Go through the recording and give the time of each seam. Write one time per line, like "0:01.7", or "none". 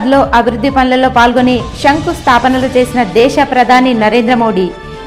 none

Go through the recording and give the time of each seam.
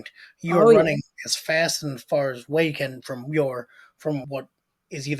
0:04.3

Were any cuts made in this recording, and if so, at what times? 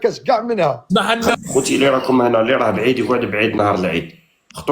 0:01.4

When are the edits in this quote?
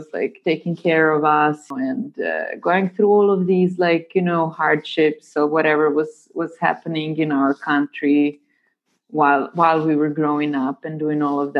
0:01.7

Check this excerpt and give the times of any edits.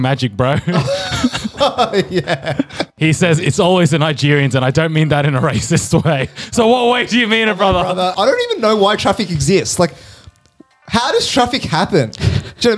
0:02.9
0:08.1

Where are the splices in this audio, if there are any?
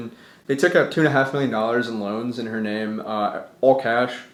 none

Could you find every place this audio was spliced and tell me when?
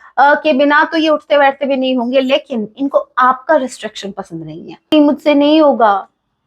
0:04.9

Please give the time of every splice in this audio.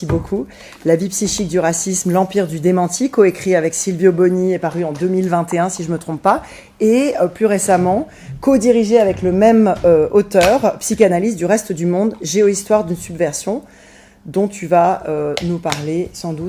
none

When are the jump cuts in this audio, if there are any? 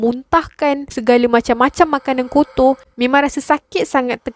0:02.9

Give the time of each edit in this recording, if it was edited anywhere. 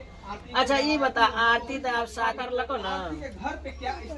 0:02.4

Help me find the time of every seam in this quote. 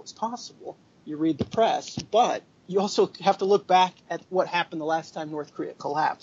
0:04.1

